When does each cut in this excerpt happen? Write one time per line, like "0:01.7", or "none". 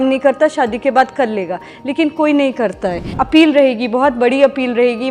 0:03.1